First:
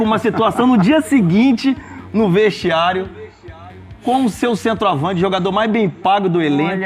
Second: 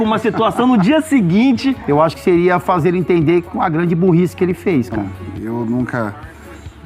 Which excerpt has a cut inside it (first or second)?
second